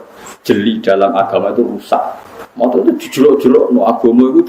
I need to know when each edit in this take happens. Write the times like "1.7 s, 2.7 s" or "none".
2.8 s